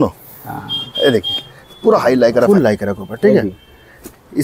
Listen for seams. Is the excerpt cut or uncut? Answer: cut